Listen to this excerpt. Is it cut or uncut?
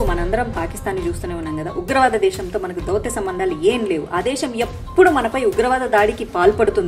uncut